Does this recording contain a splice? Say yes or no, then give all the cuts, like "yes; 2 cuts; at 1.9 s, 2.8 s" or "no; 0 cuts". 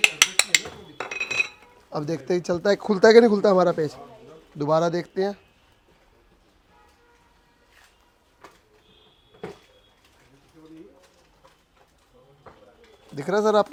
no; 0 cuts